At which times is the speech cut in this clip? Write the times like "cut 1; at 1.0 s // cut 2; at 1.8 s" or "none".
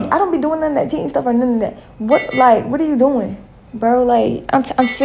cut 1; at 1.8 s